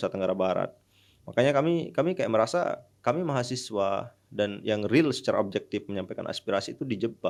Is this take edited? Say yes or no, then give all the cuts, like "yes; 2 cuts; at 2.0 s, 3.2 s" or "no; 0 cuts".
no; 0 cuts